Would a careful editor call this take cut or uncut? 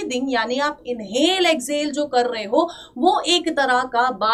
uncut